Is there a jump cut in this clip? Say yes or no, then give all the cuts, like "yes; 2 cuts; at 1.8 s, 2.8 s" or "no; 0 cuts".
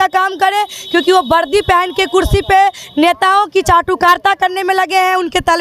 no; 0 cuts